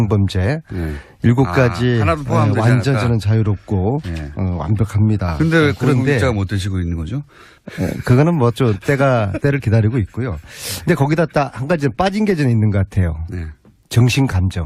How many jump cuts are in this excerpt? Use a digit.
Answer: 1